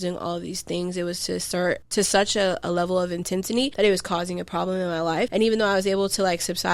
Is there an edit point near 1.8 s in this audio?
yes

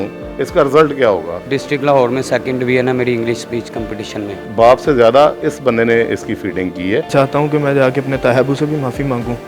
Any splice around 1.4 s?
yes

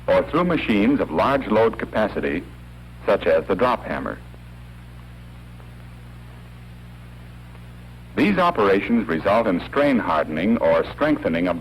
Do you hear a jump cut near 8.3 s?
no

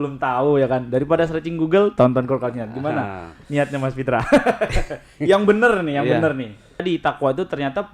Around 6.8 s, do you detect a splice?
yes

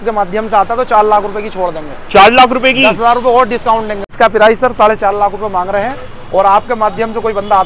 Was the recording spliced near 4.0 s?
yes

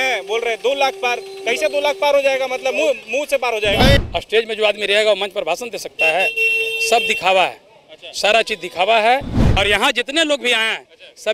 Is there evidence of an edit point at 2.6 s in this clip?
no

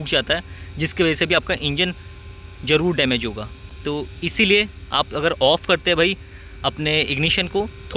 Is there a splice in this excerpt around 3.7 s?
no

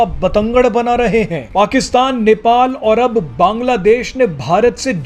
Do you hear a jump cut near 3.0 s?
no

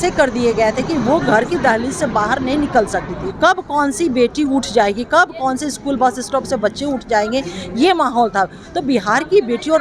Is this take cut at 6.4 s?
no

